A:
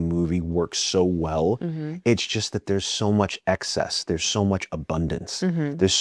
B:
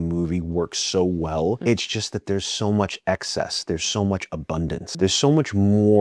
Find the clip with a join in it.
B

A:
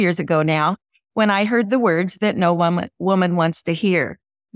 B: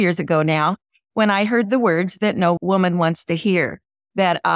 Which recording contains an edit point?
B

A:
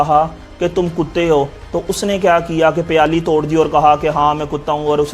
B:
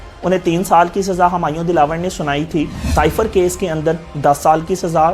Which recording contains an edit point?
B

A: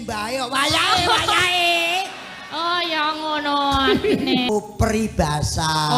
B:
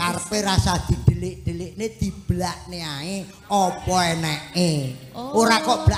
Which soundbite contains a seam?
A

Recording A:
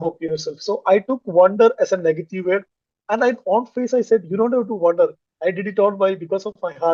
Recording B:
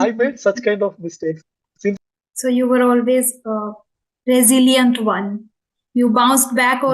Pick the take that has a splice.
B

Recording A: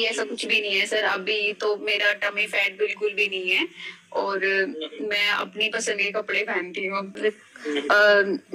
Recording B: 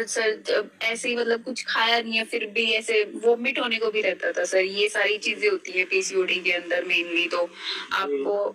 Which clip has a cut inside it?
A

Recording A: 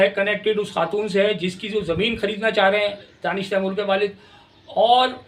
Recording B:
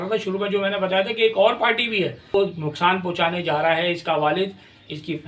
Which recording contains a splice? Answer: B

